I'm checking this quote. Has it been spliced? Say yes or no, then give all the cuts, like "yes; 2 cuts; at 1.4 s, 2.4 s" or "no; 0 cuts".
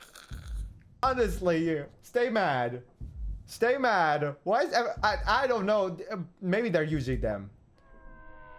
yes; 1 cut; at 1.0 s